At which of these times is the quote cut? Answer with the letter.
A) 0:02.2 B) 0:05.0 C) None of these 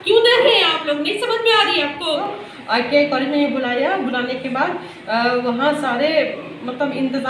A